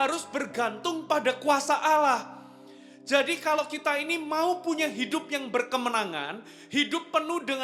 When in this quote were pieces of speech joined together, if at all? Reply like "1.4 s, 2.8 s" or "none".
none